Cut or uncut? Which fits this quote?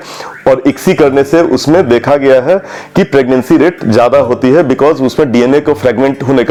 uncut